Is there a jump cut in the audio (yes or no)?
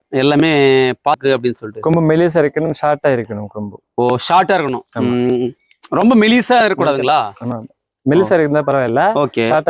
yes